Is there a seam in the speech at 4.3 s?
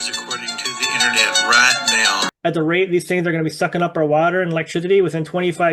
no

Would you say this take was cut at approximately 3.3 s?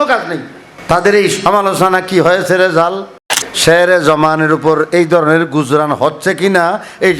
yes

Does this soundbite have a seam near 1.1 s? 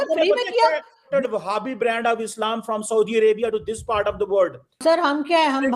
yes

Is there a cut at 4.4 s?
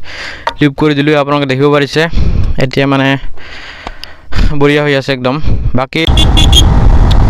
no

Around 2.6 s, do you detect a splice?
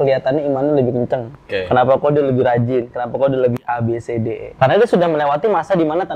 no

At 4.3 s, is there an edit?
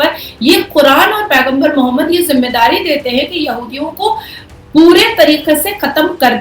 no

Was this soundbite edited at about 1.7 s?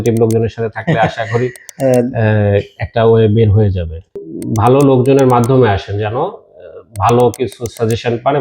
no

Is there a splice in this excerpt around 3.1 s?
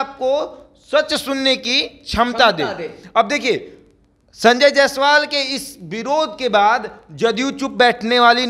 no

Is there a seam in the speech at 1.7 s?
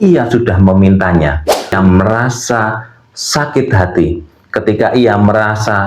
yes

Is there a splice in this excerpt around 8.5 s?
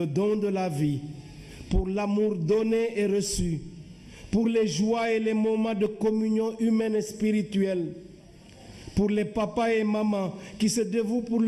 no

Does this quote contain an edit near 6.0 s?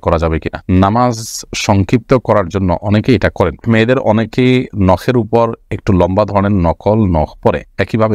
no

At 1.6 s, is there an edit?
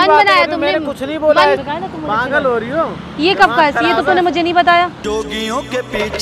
yes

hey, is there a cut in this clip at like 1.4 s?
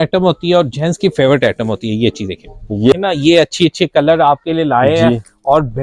no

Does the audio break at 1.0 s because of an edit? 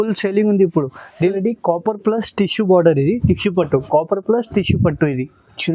yes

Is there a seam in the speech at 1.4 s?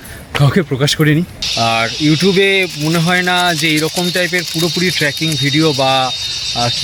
yes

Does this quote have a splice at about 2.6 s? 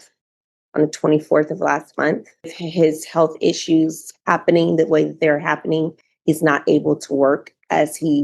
yes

